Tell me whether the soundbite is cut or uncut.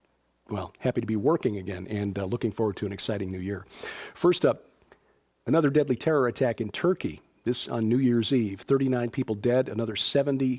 cut